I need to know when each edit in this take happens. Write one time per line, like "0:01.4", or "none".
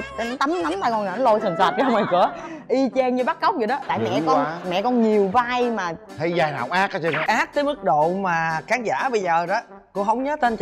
0:03.8
0:07.2